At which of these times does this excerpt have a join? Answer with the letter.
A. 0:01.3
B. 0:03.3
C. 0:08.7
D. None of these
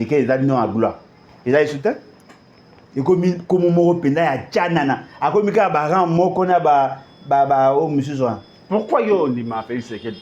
D